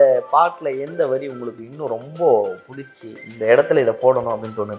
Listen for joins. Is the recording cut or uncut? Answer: uncut